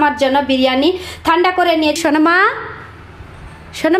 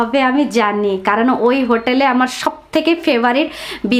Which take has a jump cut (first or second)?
first